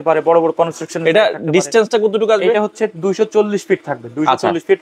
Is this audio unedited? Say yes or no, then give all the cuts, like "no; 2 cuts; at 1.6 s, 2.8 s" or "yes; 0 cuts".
yes; 0 cuts